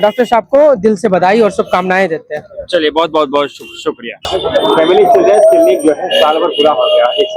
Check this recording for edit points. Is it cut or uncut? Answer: uncut